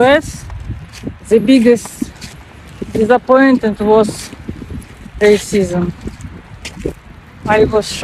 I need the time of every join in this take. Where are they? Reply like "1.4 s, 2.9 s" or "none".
none